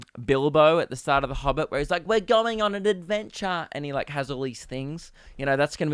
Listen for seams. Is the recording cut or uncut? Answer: uncut